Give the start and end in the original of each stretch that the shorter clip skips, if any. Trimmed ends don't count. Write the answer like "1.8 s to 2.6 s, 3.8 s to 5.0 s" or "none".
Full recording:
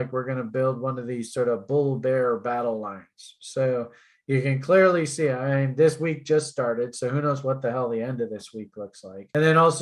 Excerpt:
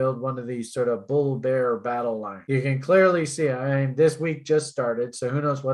2.9 s to 4.1 s